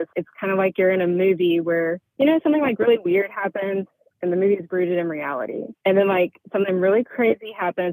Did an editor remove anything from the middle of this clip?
no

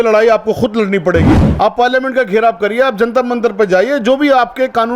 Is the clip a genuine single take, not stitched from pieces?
no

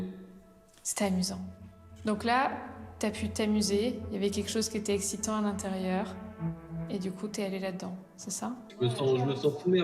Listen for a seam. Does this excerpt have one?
yes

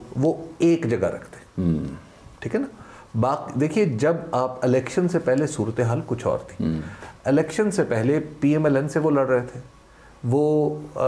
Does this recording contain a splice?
no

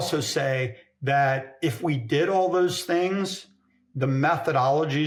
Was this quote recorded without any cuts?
yes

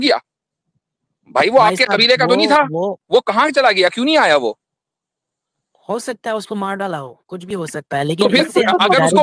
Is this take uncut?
no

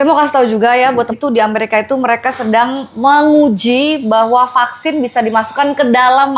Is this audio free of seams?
no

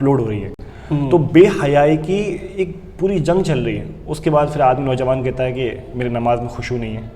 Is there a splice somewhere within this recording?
no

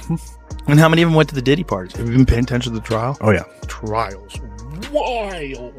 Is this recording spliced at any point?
no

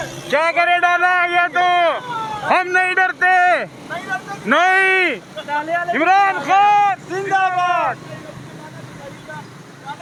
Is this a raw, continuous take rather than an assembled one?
yes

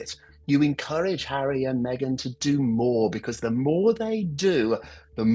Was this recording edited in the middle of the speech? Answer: no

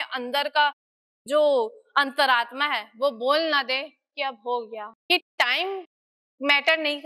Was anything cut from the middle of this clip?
yes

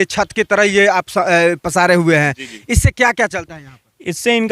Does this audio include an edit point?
no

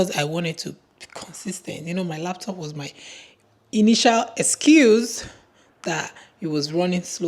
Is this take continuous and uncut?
yes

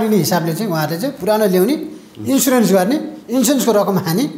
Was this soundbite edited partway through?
no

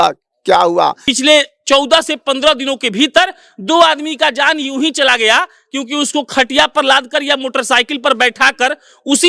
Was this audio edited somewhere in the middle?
yes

